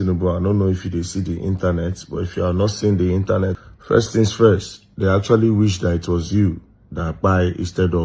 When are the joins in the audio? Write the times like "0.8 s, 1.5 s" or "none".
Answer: 3.6 s